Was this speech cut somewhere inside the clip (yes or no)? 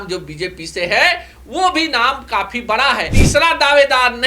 yes